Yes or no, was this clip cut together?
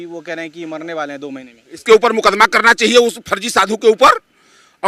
yes